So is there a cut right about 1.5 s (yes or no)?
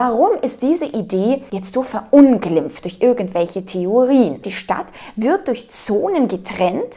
yes